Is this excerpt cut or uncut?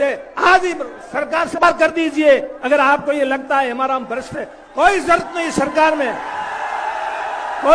cut